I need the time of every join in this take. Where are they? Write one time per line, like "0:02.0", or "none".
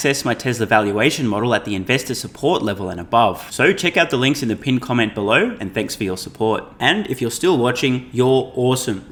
none